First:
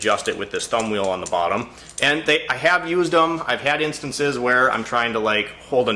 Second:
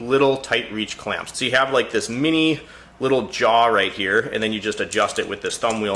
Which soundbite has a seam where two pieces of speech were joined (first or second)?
second